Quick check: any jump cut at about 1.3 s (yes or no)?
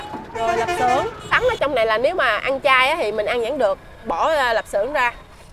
yes